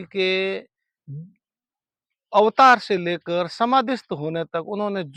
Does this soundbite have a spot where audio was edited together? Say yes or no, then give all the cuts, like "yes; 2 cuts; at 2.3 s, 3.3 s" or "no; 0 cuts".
no; 0 cuts